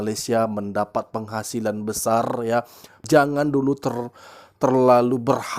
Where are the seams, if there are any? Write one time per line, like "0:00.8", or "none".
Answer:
0:03.0